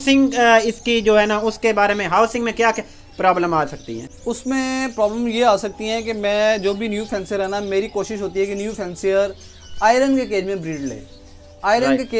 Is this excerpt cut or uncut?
uncut